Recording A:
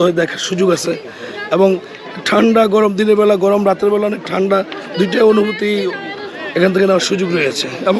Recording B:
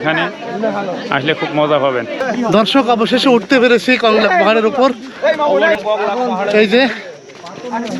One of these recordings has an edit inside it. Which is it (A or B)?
B